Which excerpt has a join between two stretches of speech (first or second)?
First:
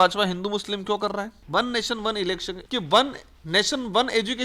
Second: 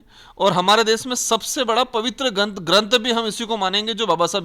first